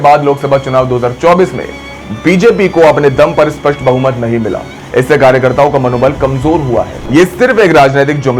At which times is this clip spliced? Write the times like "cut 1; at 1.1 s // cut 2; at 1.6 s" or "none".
cut 1; at 7.0 s